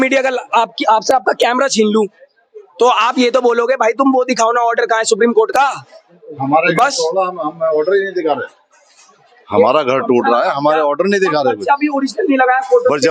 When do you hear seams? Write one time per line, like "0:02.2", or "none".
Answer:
none